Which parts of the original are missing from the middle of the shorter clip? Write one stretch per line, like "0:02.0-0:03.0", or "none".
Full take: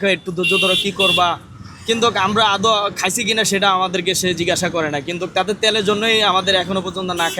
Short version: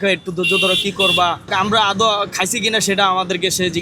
0:01.5-0:02.2